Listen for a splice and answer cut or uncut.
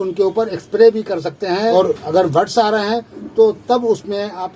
cut